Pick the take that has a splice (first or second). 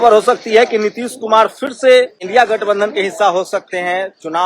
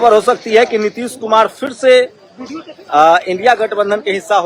first